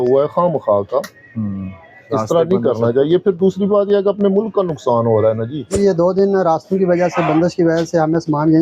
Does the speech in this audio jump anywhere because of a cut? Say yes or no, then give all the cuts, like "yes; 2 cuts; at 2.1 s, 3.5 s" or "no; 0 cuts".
yes; 1 cut; at 5.7 s